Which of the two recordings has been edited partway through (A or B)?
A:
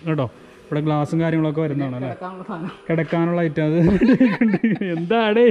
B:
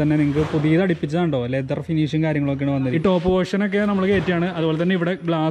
B